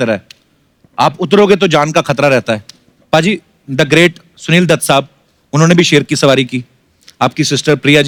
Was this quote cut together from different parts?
no; 0 cuts

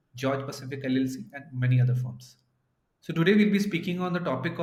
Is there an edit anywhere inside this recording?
no; 0 cuts

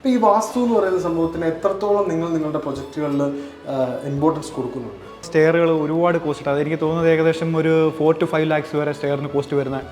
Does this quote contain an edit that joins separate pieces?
yes; 1 cut; at 5.3 s

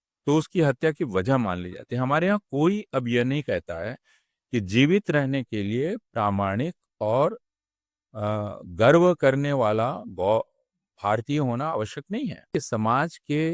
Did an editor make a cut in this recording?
yes; 1 cut; at 12.5 s

